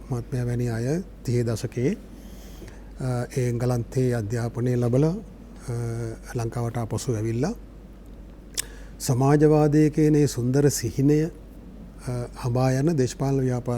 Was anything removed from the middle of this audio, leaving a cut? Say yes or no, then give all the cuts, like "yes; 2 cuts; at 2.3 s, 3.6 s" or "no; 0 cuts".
no; 0 cuts